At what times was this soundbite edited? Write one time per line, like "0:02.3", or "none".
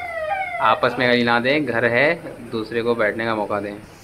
none

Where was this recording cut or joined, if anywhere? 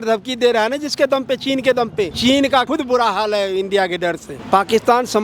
0:02.1
0:02.7
0:04.3

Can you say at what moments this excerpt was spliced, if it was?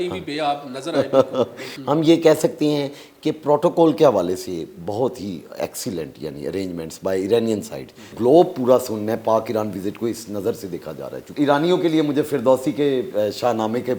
0:01.7
0:08.1
0:11.3

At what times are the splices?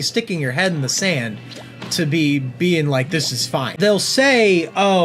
0:03.7

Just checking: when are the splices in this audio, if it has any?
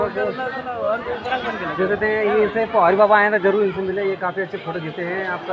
none

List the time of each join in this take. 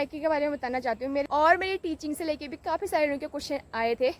0:01.3

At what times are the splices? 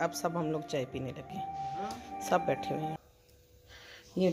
0:02.9

